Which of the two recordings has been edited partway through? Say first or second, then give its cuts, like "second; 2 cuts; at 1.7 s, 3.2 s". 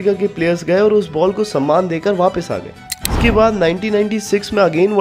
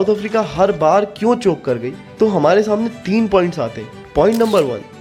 first; 1 cut; at 3.0 s